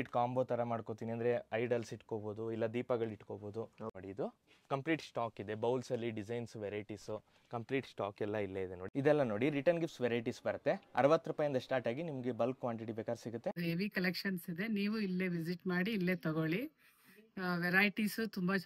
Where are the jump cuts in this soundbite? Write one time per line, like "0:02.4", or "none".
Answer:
0:03.8
0:08.8
0:13.6